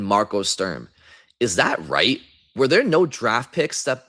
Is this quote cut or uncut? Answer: uncut